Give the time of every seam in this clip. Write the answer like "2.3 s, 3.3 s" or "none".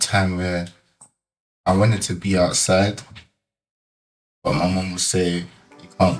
none